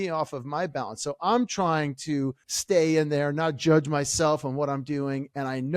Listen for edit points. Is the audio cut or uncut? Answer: cut